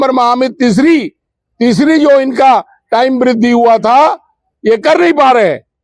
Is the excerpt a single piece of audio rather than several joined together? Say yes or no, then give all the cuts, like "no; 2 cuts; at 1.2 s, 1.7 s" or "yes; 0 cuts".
yes; 0 cuts